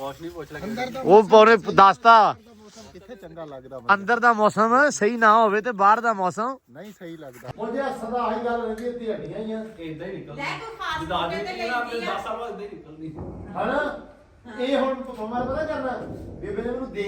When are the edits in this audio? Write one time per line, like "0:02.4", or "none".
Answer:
0:07.4